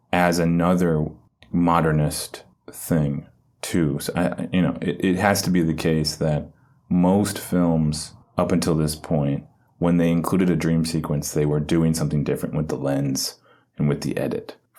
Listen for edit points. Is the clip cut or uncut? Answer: uncut